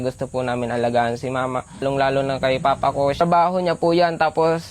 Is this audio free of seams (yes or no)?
no